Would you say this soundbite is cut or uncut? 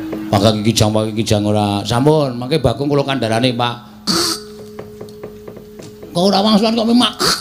cut